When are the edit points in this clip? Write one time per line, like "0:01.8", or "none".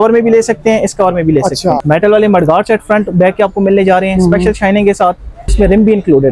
0:01.8
0:05.5